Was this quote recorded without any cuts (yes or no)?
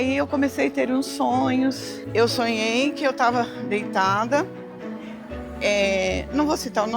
no